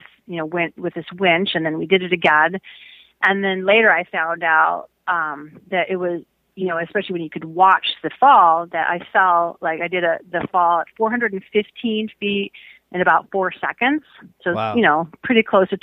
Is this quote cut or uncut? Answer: uncut